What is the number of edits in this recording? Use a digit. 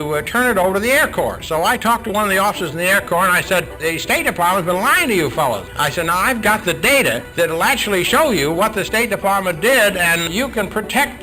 4